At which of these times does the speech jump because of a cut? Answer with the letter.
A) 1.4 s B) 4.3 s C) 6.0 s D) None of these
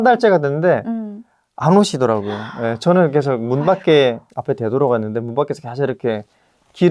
B